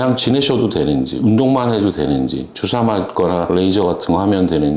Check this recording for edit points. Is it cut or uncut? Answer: uncut